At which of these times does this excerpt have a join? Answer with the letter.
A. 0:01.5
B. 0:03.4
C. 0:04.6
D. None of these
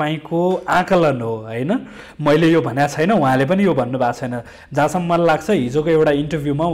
D